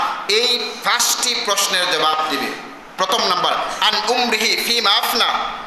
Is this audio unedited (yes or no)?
no